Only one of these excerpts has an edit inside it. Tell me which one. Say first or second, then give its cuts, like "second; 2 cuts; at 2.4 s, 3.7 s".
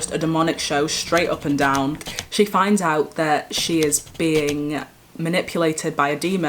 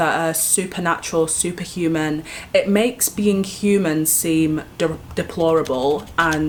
first; 1 cut; at 2.1 s